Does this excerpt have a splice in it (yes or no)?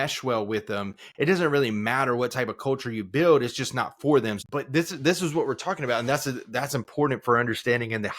yes